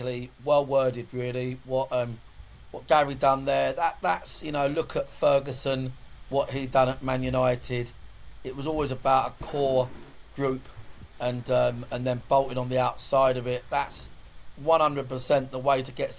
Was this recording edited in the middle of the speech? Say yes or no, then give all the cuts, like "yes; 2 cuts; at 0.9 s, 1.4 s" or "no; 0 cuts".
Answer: no; 0 cuts